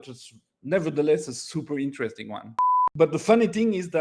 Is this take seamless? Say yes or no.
no